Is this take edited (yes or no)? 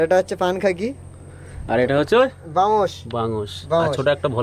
no